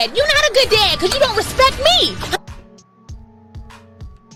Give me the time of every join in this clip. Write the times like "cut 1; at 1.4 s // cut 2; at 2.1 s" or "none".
none